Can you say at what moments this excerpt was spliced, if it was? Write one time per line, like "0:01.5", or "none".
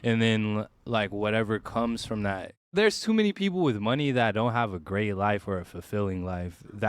0:02.7